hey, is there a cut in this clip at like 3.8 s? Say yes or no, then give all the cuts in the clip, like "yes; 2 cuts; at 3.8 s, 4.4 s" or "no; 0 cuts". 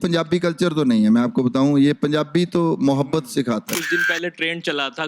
yes; 1 cut; at 3.8 s